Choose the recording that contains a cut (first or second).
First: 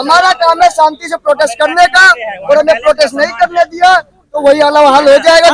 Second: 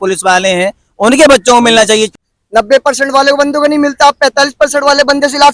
second